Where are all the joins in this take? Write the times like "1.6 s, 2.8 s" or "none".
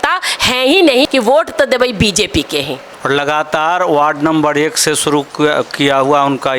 1.1 s, 2.9 s